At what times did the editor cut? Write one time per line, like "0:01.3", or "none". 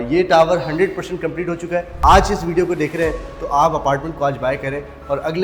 0:01.9